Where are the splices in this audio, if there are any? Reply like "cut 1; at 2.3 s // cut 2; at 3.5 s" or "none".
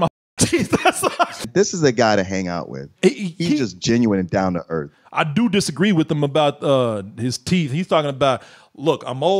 cut 1; at 1.5 s // cut 2; at 5.0 s